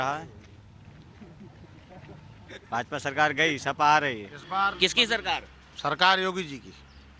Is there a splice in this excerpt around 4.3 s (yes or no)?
yes